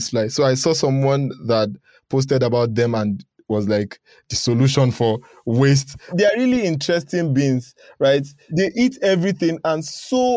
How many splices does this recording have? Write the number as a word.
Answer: two